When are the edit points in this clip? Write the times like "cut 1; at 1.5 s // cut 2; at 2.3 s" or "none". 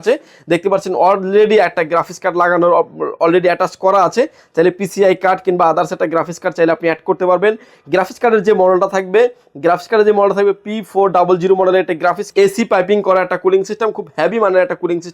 cut 1; at 12.2 s